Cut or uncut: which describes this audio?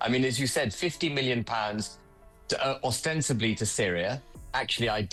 uncut